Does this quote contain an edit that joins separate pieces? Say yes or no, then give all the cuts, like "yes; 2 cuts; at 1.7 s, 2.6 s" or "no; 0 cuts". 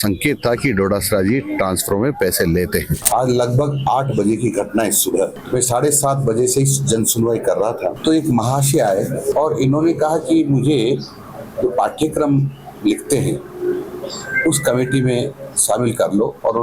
yes; 4 cuts; at 3.0 s, 5.4 s, 8.0 s, 9.3 s